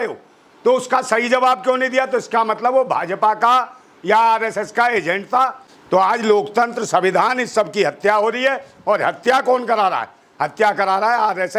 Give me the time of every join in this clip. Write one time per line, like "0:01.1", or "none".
0:05.7